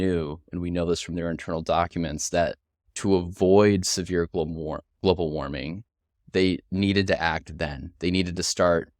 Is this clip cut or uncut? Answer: uncut